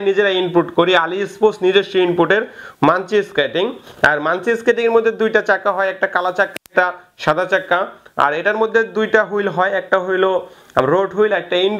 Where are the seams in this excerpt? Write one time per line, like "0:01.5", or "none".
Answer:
none